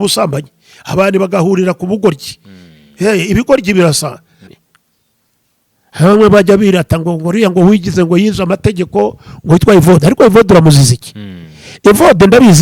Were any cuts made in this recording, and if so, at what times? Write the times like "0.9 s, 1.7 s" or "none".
4.4 s